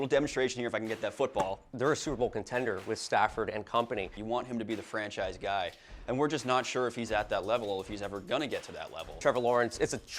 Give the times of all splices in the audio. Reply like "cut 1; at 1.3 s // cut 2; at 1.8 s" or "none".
cut 1; at 1.7 s // cut 2; at 4.2 s // cut 3; at 9.2 s